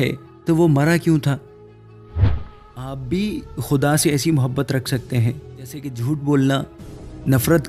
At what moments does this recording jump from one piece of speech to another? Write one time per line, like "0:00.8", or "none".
0:03.0
0:06.0